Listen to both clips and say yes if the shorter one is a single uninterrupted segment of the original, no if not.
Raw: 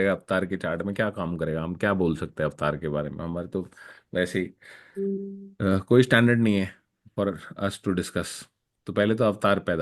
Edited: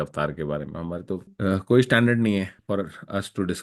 no